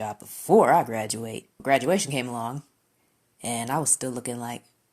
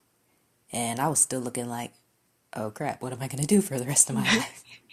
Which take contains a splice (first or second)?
first